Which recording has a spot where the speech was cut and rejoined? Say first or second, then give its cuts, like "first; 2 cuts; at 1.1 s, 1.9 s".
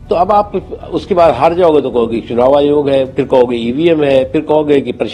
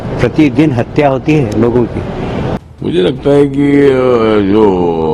second; 1 cut; at 2.6 s